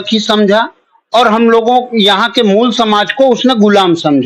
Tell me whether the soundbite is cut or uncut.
uncut